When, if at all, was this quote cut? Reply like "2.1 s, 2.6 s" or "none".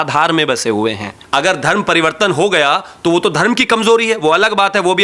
1.2 s